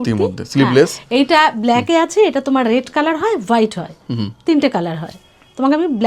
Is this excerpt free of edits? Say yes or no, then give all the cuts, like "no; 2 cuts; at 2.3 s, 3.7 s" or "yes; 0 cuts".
yes; 0 cuts